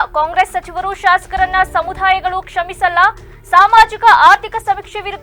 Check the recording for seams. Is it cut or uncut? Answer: uncut